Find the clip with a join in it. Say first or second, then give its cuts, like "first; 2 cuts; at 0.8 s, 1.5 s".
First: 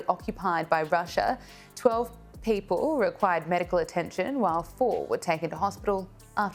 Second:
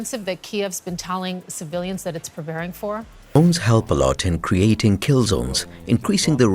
second; 1 cut; at 3.2 s